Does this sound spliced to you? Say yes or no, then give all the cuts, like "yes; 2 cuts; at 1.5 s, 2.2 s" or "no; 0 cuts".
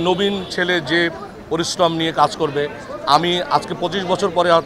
no; 0 cuts